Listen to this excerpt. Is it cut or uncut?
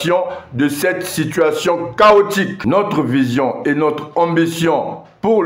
cut